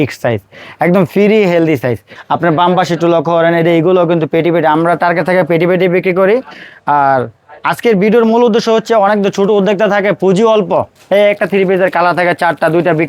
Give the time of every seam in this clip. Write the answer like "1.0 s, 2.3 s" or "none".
2.1 s, 11.0 s